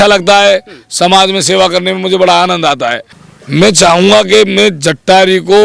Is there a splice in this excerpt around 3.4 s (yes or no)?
yes